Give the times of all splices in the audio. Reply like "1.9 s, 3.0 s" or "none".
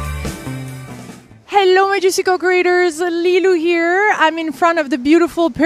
none